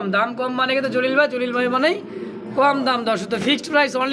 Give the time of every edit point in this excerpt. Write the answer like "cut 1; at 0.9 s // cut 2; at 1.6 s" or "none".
none